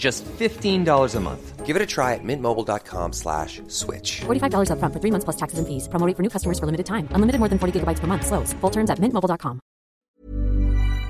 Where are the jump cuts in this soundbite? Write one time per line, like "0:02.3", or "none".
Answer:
0:10.0